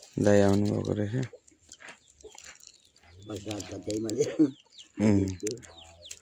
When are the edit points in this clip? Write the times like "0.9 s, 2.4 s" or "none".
none